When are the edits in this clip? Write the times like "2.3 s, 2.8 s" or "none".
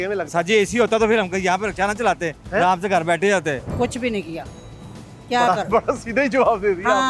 3.7 s